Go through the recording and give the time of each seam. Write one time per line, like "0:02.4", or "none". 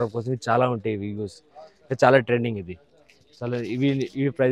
none